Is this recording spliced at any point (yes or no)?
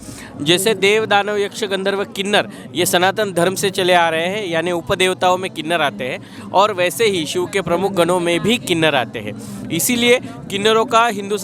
no